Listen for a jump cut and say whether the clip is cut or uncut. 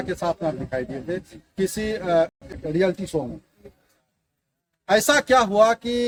uncut